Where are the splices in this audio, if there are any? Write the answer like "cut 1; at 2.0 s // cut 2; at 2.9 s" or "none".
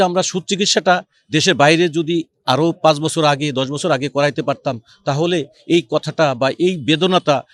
none